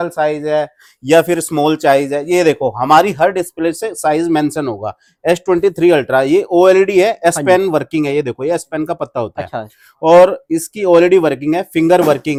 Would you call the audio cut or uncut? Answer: uncut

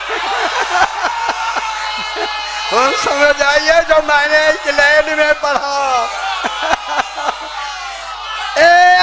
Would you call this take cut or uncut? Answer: uncut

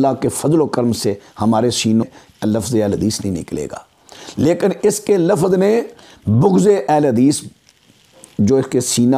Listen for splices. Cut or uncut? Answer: cut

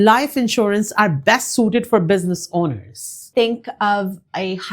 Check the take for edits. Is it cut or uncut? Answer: cut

